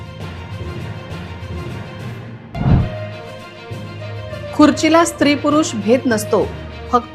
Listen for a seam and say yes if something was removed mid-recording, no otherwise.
no